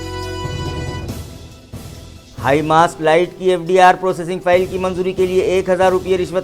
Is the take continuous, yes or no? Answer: no